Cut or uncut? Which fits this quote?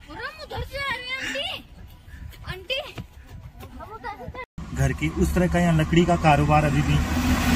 cut